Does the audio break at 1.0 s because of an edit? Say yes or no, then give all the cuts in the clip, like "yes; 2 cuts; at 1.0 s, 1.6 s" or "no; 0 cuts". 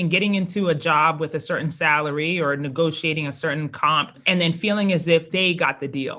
no; 2 cuts; at 4.2 s, 5.3 s